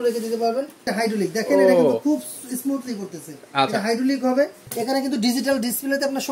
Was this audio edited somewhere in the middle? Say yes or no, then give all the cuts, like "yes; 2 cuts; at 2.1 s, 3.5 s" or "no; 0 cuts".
yes; 2 cuts; at 0.9 s, 4.7 s